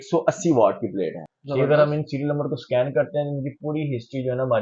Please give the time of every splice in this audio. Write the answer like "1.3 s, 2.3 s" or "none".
1.2 s